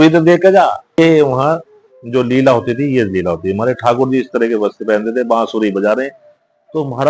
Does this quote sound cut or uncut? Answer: cut